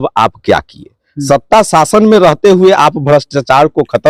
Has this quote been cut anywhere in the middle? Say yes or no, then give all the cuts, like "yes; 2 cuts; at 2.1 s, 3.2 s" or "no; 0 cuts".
no; 0 cuts